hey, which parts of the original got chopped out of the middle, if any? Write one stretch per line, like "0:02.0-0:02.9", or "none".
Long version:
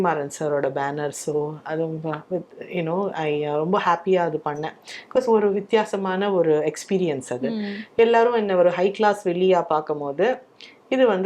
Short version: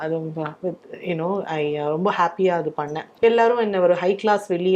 0:04.7-0:07.8